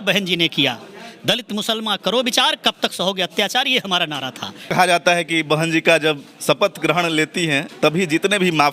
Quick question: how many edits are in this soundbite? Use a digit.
1